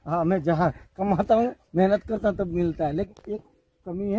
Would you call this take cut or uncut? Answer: cut